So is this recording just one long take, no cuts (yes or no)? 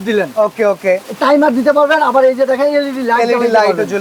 yes